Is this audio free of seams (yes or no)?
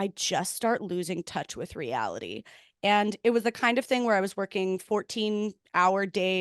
yes